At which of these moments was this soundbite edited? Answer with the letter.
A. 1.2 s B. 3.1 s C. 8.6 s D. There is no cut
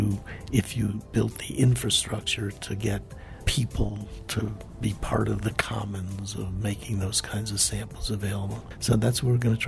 C